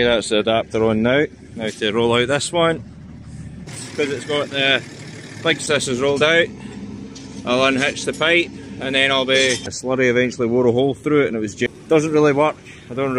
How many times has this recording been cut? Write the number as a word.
four